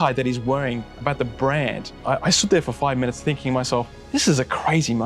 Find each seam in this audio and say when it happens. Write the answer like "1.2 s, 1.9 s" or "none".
1.9 s